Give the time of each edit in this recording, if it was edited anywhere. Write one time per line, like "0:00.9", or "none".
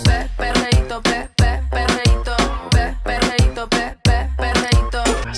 none